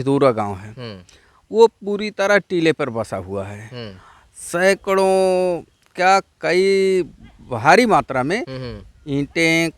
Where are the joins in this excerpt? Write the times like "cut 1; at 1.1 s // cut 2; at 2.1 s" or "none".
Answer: none